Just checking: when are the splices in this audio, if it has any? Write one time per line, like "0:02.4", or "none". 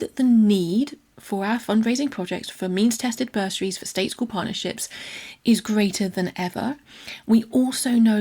0:02.5